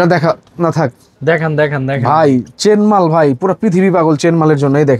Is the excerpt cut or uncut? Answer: uncut